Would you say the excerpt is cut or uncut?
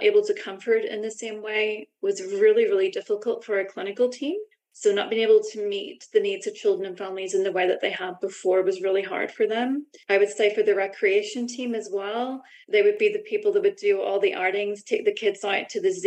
uncut